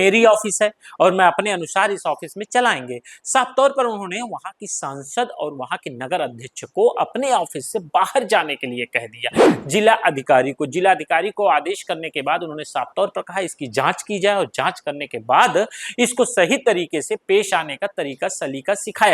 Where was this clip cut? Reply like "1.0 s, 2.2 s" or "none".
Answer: 9.5 s